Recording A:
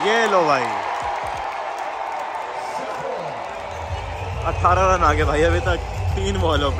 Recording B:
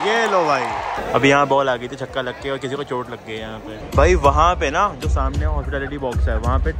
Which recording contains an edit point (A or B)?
B